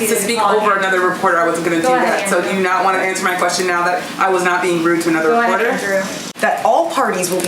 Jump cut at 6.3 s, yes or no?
yes